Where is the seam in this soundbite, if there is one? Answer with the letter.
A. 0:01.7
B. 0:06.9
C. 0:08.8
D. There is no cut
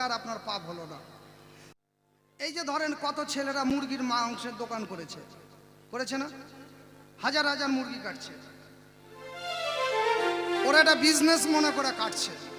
A